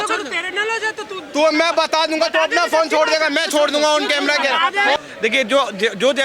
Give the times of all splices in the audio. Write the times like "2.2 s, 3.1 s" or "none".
5.0 s